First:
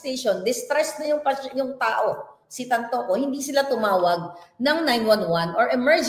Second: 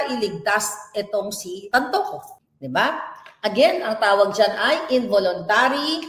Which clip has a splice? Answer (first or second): second